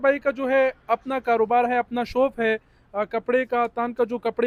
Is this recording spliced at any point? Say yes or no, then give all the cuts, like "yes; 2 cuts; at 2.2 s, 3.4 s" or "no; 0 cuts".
no; 0 cuts